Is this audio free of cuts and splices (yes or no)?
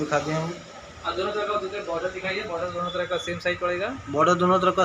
yes